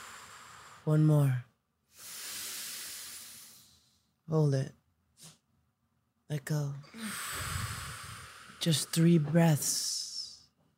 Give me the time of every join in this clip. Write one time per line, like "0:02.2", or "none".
none